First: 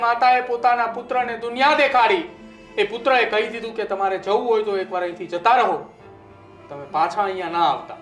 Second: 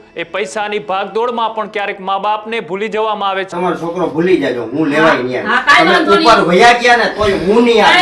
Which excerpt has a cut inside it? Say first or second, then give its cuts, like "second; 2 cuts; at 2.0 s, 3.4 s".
second; 1 cut; at 3.5 s